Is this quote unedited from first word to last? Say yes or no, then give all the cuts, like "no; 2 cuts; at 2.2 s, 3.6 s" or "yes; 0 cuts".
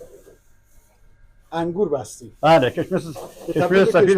yes; 0 cuts